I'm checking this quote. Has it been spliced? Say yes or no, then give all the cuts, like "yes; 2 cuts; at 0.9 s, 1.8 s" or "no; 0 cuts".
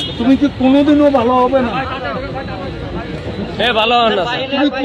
no; 0 cuts